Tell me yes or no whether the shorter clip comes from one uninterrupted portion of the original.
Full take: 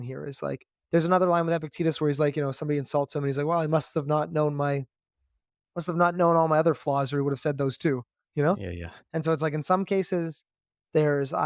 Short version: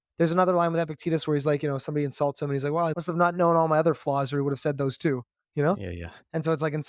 no